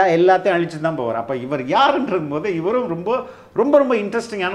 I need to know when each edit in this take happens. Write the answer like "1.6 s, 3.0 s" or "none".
none